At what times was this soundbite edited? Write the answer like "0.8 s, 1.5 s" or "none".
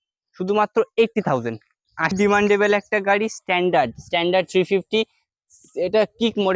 2.1 s